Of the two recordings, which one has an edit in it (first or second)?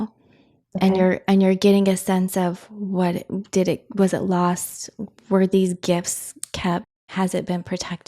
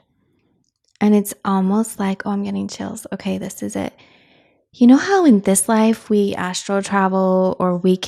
first